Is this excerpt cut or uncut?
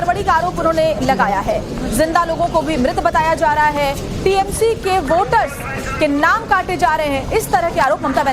uncut